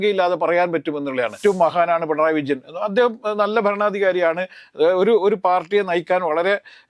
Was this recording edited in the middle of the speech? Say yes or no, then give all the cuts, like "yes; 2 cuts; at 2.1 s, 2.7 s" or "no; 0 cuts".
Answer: yes; 1 cut; at 1.3 s